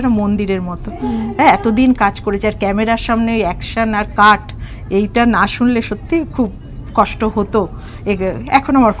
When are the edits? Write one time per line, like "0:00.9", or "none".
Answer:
none